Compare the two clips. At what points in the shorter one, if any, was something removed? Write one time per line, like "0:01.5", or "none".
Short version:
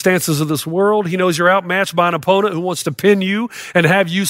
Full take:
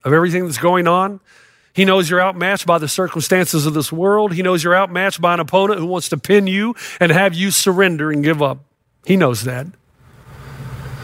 none